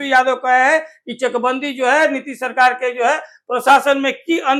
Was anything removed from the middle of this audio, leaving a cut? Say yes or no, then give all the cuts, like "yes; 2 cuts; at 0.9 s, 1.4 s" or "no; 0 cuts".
no; 0 cuts